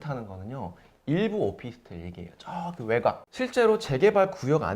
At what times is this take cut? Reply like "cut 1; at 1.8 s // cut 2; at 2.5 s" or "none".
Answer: cut 1; at 3.2 s